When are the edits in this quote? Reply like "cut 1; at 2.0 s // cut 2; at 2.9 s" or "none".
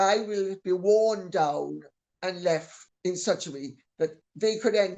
cut 1; at 2.8 s